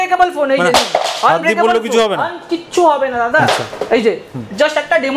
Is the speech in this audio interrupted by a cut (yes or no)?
no